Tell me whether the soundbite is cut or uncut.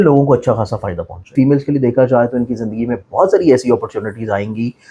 cut